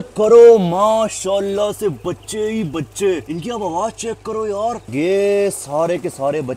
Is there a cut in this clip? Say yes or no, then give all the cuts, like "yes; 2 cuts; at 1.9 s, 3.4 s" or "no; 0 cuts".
yes; 1 cut; at 4.8 s